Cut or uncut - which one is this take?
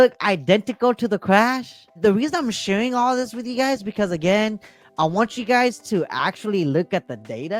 uncut